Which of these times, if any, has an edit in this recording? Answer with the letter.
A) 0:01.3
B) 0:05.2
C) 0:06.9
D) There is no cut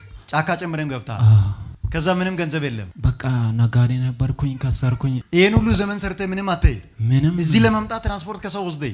B